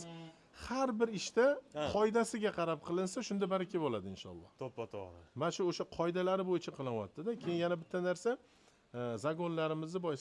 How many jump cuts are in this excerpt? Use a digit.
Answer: 0